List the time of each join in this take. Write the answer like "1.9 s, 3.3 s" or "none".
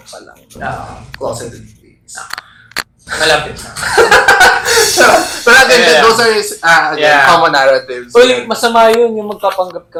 none